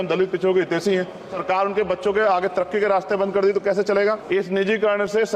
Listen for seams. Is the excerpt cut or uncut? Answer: cut